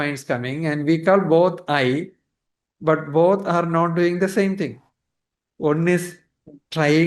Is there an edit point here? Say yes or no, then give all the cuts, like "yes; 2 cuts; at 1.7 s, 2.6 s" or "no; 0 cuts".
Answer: no; 0 cuts